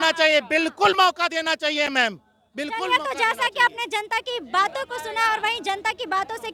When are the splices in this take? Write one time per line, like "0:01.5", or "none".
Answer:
none